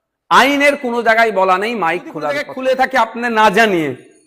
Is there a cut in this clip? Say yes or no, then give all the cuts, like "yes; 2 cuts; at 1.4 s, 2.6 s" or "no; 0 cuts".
yes; 1 cut; at 2.5 s